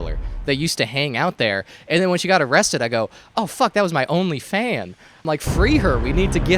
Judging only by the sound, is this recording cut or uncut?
cut